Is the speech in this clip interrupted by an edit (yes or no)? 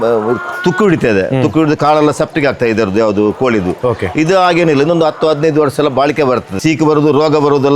yes